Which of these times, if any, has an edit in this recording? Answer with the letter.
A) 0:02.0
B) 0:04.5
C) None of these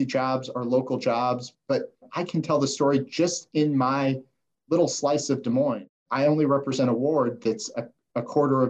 A